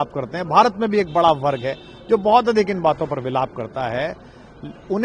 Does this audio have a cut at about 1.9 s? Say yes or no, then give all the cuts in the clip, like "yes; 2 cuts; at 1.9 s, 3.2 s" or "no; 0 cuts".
no; 0 cuts